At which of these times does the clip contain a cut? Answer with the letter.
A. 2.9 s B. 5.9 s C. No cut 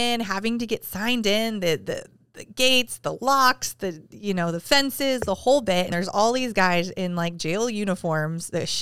B